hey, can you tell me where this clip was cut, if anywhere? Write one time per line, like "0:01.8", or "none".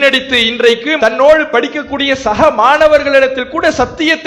none